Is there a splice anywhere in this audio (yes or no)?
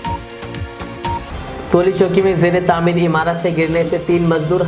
no